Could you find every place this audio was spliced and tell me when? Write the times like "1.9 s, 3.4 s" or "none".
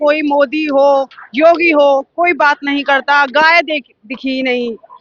none